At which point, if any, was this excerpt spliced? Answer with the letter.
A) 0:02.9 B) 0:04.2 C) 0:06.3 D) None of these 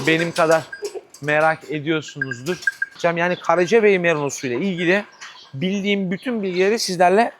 A